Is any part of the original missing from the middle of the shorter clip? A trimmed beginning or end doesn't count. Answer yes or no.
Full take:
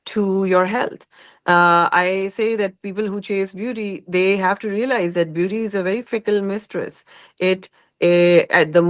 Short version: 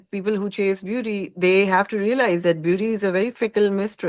no